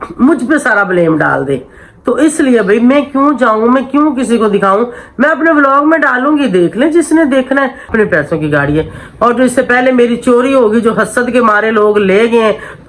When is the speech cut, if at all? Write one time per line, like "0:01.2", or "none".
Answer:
0:07.8